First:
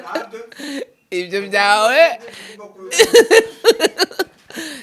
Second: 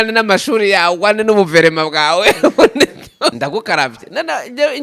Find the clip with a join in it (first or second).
second